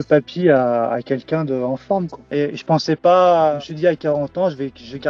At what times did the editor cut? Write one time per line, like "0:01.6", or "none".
0:02.2